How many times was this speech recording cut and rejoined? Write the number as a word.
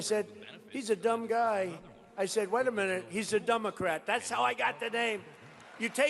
one